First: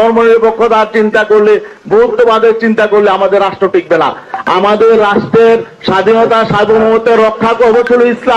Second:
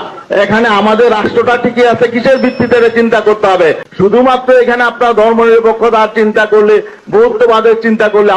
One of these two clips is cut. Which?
second; 1 cut; at 3.9 s

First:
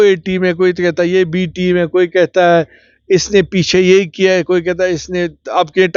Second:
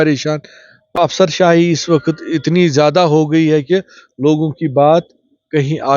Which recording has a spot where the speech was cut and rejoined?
second; 1 cut; at 0.9 s

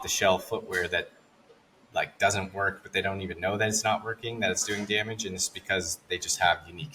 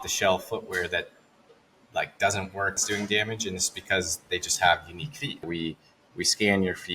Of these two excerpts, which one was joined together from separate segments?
second; 2 cuts; at 2.8 s, 5.5 s

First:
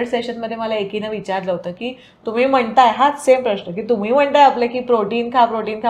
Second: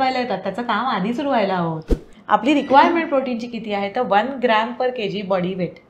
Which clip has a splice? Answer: second; 1 cut; at 2.1 s

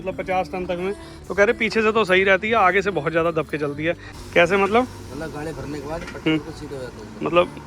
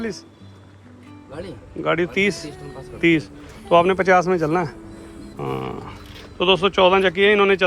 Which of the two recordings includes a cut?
first; 1 cut; at 4.1 s

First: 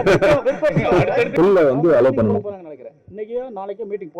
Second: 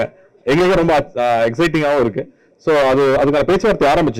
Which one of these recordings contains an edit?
first; 1 cut; at 1.3 s

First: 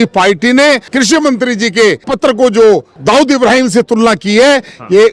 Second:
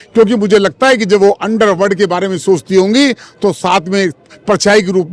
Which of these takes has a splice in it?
first; 3 cuts; at 0.9 s, 2.1 s, 2.9 s

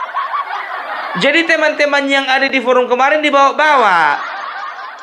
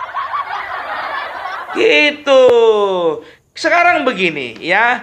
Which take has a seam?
first; 2 cuts; at 1.1 s, 4.2 s

